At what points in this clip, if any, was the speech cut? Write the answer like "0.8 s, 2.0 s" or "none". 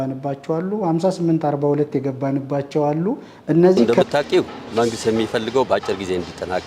3.9 s